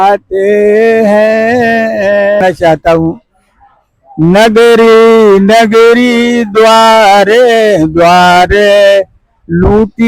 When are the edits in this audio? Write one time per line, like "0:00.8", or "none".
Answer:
0:02.4